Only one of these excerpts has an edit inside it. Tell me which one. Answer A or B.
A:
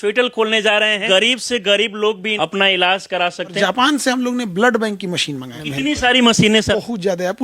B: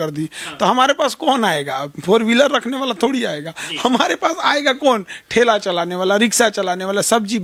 A